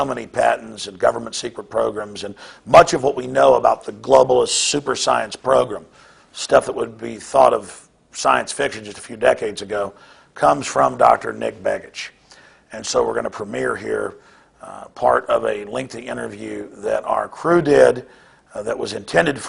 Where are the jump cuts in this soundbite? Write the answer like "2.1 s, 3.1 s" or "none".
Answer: 2.6 s